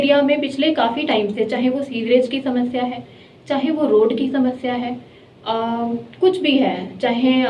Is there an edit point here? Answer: no; 0 cuts

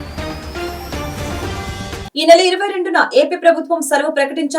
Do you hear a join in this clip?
yes; 1 cut; at 1.9 s

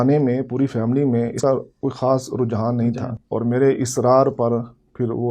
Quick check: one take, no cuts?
no; 2 cuts; at 1.4 s, 3.2 s

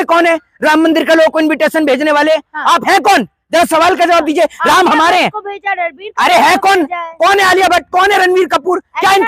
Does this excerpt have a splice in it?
no; 0 cuts

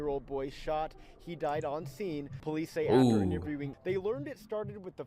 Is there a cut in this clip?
yes; 2 cuts; at 2.3 s, 3.7 s

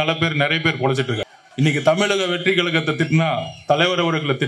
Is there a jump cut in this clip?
yes; 1 cut; at 1.3 s

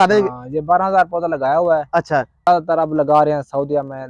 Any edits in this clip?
yes; 1 cut; at 2.5 s

